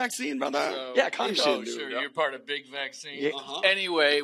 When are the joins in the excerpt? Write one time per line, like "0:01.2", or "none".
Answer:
0:01.4